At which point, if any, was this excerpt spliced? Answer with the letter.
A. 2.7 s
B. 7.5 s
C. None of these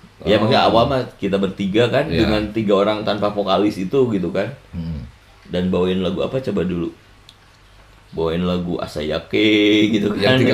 C